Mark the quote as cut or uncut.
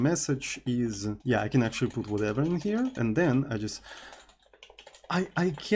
cut